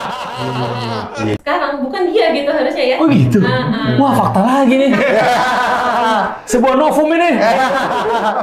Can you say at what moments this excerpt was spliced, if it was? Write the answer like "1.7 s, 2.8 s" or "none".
1.4 s